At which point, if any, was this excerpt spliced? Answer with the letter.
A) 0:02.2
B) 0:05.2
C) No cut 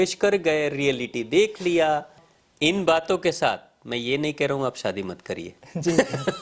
A